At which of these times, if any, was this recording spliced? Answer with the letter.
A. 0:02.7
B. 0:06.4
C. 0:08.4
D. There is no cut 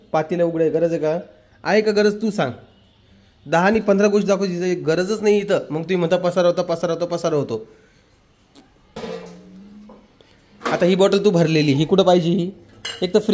D